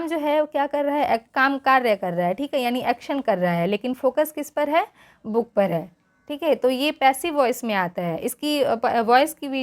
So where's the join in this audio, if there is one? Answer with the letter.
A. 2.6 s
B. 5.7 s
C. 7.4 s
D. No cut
D